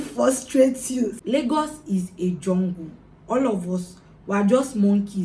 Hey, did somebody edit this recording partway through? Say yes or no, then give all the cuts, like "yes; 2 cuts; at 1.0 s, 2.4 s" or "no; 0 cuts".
yes; 1 cut; at 1.2 s